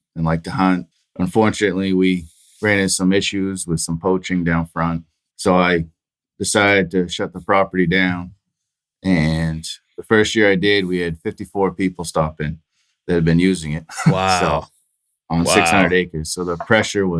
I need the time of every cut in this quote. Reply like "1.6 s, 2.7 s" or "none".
0.9 s